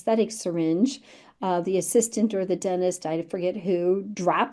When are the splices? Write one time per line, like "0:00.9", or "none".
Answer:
none